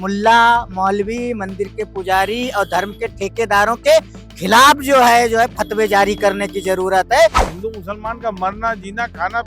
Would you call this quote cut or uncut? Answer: cut